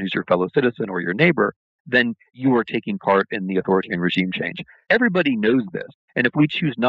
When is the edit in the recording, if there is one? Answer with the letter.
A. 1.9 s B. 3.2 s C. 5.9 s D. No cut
C